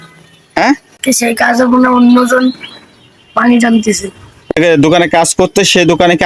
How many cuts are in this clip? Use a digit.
2